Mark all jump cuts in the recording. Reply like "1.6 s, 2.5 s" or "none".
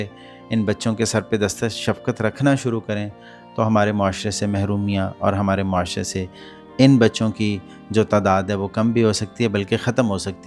none